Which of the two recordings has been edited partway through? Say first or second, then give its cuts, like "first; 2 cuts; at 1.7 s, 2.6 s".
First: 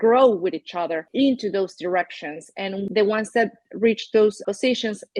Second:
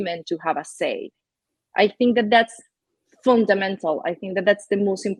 first; 3 cuts; at 1.0 s, 2.9 s, 4.4 s